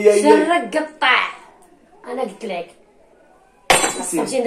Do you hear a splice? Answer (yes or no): no